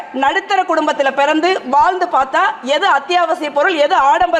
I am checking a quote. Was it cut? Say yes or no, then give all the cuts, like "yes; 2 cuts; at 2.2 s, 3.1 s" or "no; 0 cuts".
no; 0 cuts